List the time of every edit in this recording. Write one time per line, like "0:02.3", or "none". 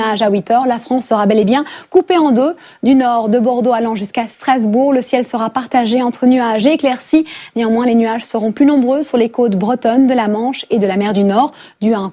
none